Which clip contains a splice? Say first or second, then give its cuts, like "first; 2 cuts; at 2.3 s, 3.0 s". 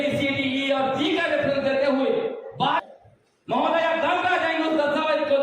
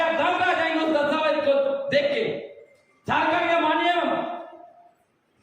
first; 1 cut; at 2.8 s